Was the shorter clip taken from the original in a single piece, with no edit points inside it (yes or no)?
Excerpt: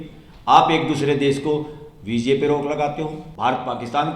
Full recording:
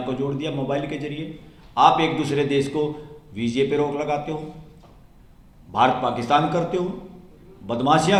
no